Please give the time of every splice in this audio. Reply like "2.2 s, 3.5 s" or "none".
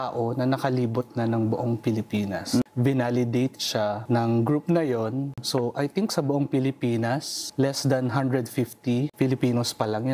2.6 s, 4.0 s, 5.4 s, 7.4 s, 9.1 s